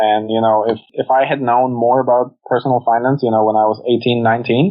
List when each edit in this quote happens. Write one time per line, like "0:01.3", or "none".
0:00.9